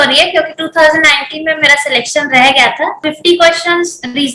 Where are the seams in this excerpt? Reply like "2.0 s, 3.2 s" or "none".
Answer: 3.1 s